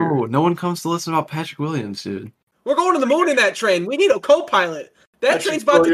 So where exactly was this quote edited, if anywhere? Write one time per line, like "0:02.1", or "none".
0:02.5